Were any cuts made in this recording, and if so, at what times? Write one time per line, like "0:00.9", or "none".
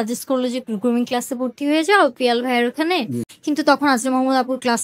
0:03.3